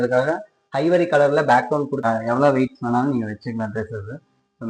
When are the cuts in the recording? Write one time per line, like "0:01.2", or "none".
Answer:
0:02.0

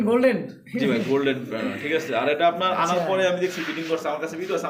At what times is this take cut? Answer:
none

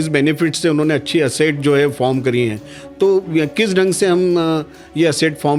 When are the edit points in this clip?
none

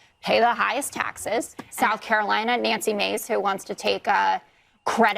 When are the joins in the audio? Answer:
0:01.6

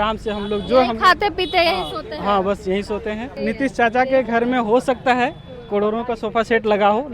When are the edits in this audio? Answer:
0:03.3

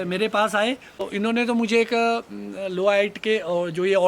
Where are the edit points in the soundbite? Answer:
0:01.1

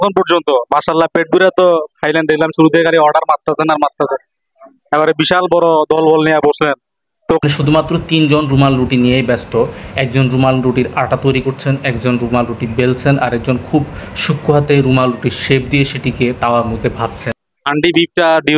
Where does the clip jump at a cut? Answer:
0:07.4
0:17.4

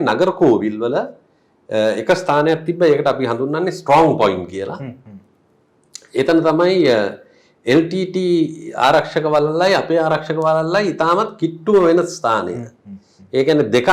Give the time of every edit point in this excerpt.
none

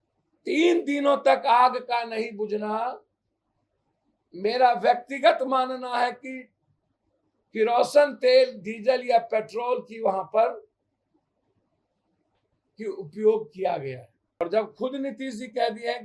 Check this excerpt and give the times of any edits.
0:14.4

